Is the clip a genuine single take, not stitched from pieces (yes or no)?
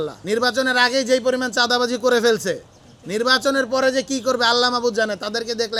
yes